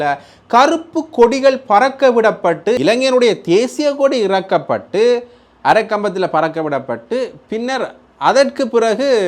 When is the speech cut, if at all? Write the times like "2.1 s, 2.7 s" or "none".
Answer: 2.8 s